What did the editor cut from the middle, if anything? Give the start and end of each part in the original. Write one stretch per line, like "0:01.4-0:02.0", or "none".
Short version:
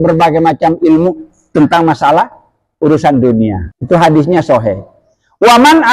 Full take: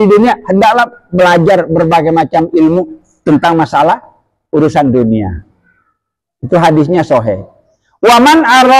0:05.4-0:06.3